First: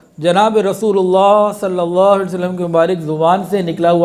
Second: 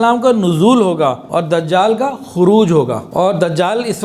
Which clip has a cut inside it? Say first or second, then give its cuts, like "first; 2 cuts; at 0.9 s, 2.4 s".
second; 2 cuts; at 1.2 s, 3.1 s